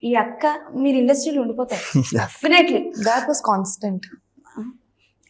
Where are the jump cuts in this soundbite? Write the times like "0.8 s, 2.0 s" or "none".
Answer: none